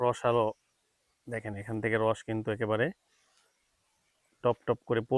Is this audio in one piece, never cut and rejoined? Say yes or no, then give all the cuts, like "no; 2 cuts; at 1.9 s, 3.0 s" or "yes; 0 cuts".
yes; 0 cuts